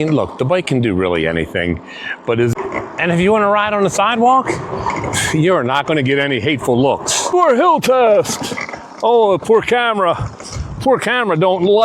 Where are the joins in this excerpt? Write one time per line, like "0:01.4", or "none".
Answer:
0:02.5
0:07.3